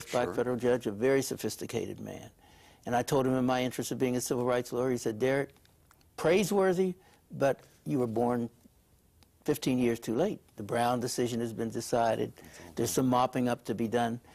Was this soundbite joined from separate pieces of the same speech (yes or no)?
yes